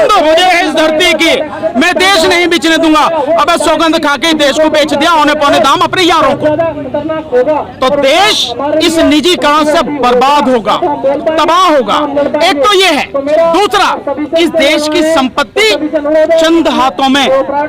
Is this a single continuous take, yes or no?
yes